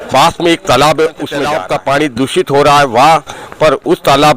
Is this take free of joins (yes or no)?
no